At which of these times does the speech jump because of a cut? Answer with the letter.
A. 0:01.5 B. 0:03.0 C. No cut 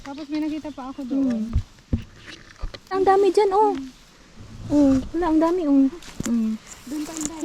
B